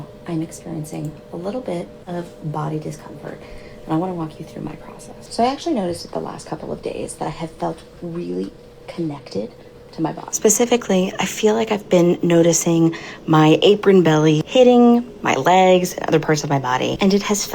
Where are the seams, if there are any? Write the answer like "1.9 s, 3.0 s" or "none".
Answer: 6.4 s, 11.6 s